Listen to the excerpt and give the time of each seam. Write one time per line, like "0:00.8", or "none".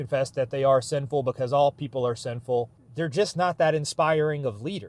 0:02.8